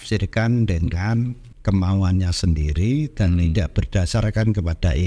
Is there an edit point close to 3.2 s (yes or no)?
no